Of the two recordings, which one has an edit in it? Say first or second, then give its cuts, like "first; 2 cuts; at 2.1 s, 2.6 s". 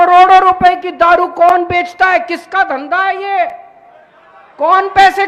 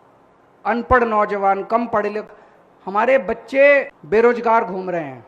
second; 1 cut; at 4.0 s